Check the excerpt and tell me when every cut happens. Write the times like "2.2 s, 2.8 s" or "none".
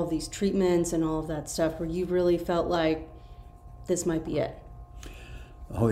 none

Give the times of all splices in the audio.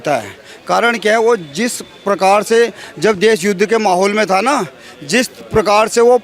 none

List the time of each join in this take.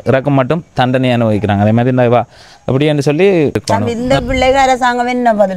3.6 s

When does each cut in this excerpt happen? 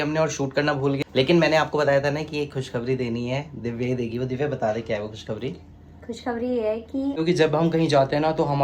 1.0 s, 7.2 s

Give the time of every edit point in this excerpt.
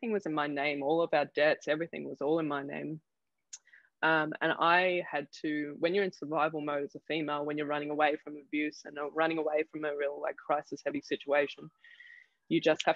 none

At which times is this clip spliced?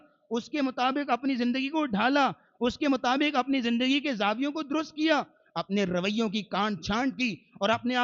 none

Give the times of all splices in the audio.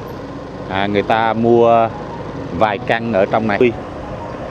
3.6 s

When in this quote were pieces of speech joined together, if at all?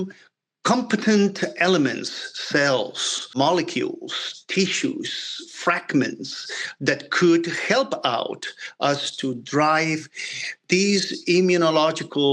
3.3 s

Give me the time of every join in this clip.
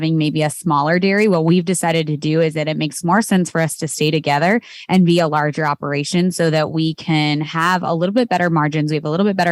none

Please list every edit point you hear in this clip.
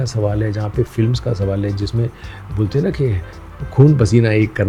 none

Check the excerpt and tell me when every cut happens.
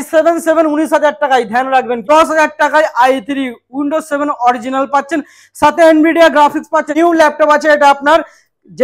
2.0 s, 6.9 s

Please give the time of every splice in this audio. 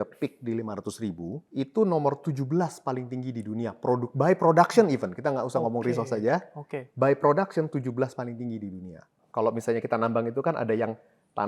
1.4 s, 9.2 s

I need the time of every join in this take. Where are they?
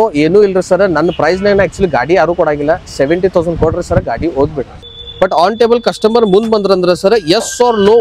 4.8 s

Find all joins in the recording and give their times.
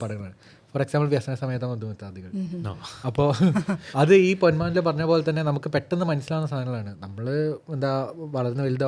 none

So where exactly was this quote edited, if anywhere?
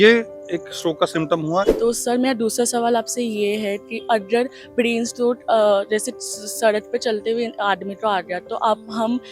1.7 s

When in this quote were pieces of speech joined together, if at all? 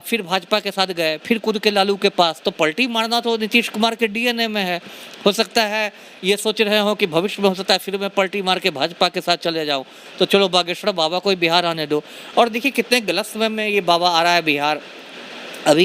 none

